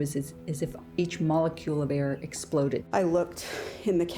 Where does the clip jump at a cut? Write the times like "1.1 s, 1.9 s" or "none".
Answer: 2.8 s